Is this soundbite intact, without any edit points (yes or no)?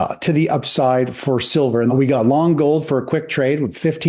no